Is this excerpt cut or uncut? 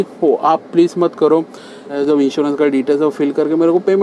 cut